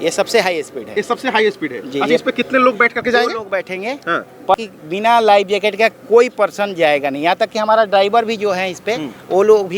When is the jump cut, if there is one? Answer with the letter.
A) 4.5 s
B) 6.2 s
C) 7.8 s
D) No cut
A